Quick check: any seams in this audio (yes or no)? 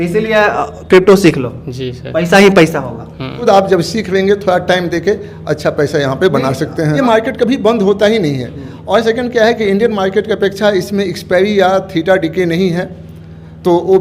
yes